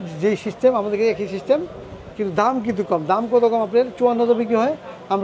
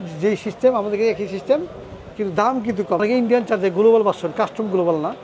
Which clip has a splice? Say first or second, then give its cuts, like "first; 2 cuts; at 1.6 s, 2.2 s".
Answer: second; 1 cut; at 3.0 s